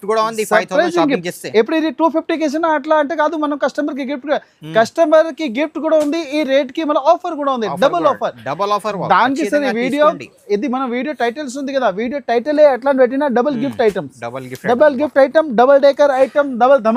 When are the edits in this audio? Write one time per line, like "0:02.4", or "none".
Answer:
none